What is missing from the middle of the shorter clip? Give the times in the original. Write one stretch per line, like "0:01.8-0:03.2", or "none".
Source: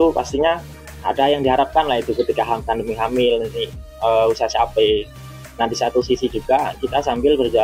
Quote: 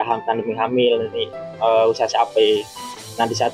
none